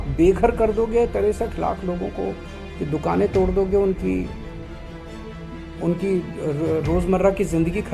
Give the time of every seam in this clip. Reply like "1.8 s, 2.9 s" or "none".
none